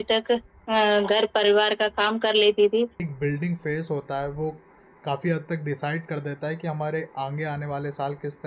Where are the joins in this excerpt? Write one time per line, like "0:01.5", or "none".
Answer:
0:03.0